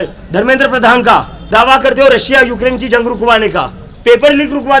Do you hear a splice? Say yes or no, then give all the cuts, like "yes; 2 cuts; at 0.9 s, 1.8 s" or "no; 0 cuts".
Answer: yes; 2 cuts; at 1.4 s, 3.8 s